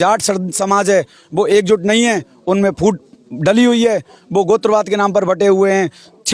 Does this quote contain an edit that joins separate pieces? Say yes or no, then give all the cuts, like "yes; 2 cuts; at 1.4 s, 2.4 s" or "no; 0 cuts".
no; 0 cuts